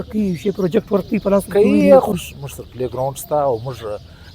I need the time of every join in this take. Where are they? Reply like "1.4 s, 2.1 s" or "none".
2.1 s